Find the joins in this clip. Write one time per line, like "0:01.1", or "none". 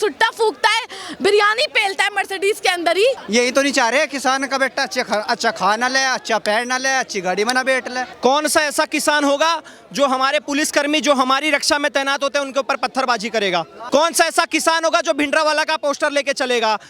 0:03.2
0:08.0
0:13.8